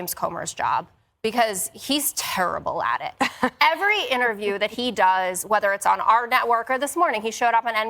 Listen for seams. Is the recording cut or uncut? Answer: cut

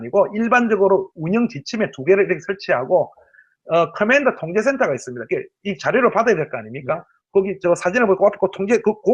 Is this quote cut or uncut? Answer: cut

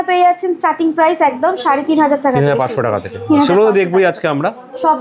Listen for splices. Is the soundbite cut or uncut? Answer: uncut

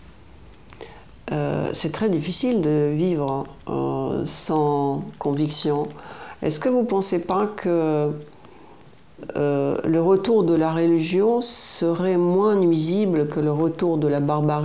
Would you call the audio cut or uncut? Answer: uncut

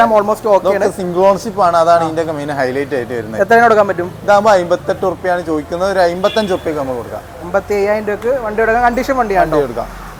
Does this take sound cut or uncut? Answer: uncut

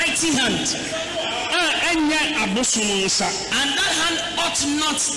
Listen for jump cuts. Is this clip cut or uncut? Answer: uncut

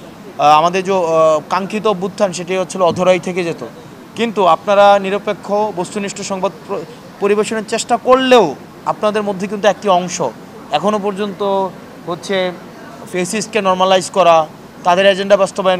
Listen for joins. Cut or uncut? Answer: uncut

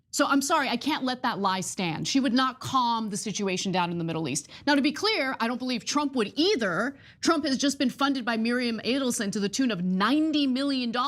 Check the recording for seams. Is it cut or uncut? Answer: uncut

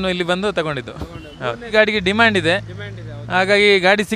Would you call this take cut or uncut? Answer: uncut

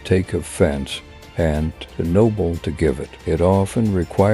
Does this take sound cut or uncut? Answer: uncut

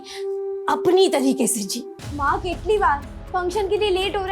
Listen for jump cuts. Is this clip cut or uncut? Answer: cut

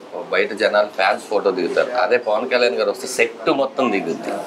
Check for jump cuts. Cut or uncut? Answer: uncut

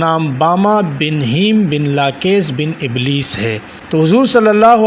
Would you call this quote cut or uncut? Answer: cut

